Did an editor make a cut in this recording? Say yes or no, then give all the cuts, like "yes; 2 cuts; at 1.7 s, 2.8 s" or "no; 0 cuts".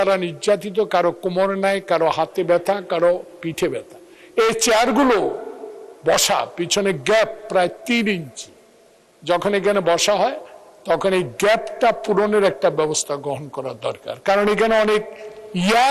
no; 0 cuts